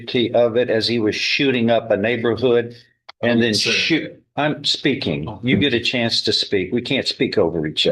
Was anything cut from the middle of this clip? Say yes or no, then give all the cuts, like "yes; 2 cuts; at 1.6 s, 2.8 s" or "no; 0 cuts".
no; 0 cuts